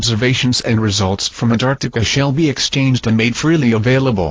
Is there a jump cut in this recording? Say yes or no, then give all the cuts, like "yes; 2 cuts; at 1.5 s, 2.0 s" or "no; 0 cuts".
no; 0 cuts